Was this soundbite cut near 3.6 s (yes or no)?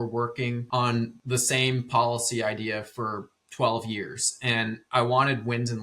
no